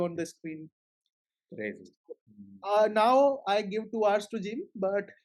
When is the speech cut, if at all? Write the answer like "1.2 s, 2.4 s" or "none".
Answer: none